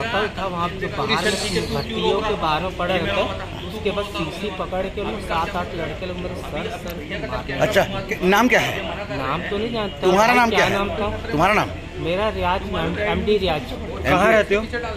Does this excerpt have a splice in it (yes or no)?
no